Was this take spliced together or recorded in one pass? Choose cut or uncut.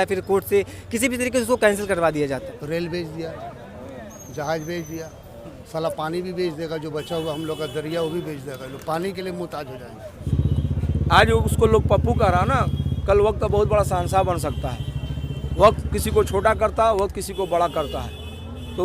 cut